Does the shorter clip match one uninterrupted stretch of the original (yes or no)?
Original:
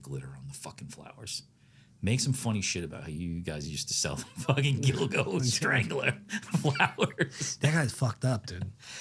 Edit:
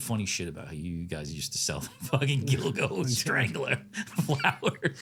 yes